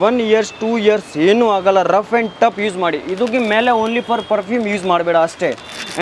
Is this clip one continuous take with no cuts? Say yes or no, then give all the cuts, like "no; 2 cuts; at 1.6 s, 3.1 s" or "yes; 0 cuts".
yes; 0 cuts